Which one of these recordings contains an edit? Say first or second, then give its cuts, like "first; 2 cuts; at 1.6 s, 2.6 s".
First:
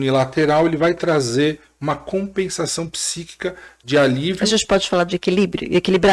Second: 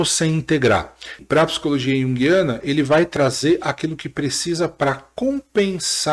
second; 1 cut; at 1.2 s